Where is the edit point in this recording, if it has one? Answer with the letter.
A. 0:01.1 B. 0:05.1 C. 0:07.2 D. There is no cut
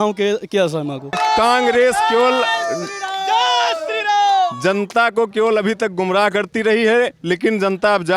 A